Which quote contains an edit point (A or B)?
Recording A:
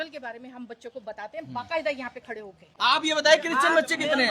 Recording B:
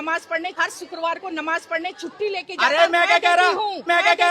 A